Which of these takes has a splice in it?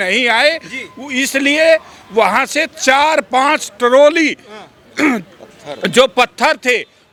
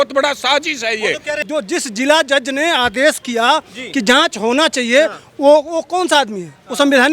second; 1 cut; at 1.3 s

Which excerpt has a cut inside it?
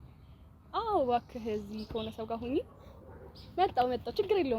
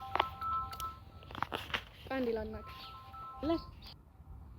second; 1 cut; at 3.4 s

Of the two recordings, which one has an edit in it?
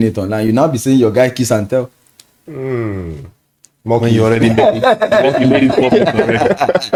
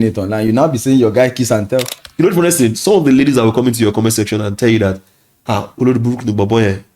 second; 1 cut; at 2.0 s

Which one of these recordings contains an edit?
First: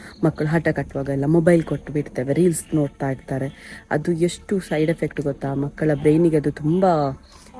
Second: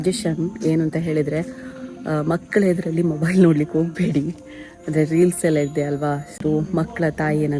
second; 1 cut; at 6.4 s

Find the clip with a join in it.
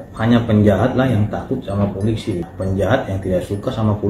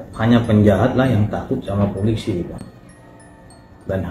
first; 1 cut; at 2.5 s

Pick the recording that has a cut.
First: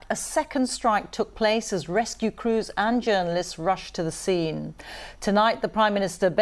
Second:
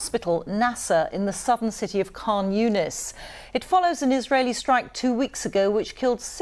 first; 2 cuts; at 1.5 s, 3.5 s

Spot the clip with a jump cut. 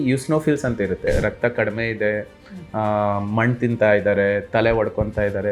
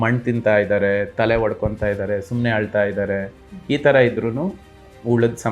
first; 1 cut; at 1.1 s

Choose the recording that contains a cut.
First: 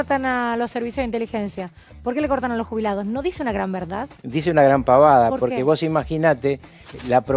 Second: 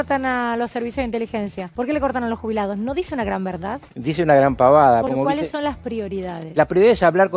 second; 2 cuts; at 1.6 s, 5.1 s

